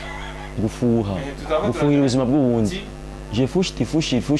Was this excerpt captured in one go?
yes; 0 cuts

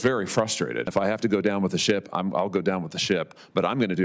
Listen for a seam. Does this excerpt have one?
yes; 1 cut; at 0.9 s

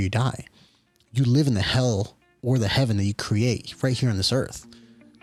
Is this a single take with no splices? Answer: yes; 0 cuts

